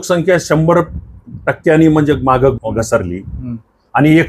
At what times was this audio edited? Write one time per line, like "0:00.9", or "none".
0:02.5